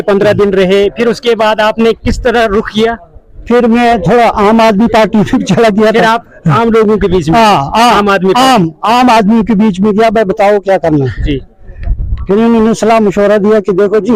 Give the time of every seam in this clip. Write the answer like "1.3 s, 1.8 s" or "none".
none